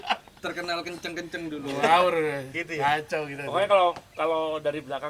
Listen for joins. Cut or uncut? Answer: uncut